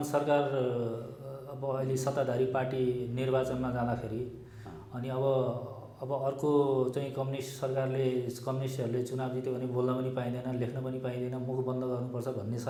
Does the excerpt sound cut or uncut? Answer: uncut